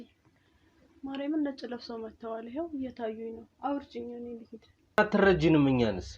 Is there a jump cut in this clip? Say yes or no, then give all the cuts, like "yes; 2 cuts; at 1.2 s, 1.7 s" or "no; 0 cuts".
yes; 1 cut; at 5.0 s